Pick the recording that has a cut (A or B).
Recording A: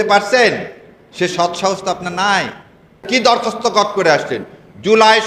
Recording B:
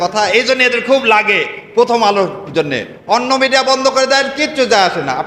A